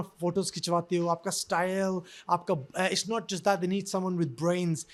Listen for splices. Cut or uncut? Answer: uncut